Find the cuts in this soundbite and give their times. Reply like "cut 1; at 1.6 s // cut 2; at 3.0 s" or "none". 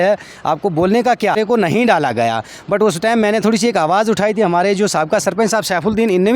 cut 1; at 1.4 s